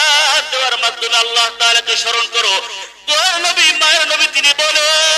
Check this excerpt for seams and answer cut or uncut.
cut